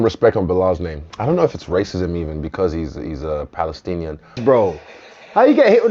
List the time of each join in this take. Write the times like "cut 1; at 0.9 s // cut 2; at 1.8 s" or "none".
cut 1; at 0.9 s // cut 2; at 4.4 s